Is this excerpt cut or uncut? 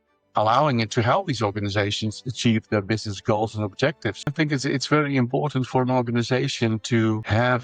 cut